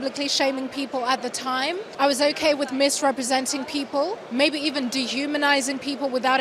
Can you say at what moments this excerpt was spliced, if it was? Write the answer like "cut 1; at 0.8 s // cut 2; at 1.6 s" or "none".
cut 1; at 1.9 s